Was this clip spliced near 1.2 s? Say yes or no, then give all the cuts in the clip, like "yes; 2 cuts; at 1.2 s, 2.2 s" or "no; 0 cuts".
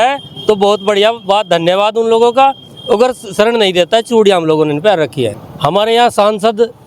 no; 1 cut; at 5.4 s